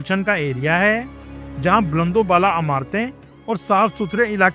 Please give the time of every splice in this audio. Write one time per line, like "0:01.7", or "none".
none